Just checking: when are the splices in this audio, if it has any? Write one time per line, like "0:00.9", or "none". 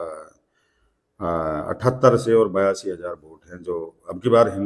none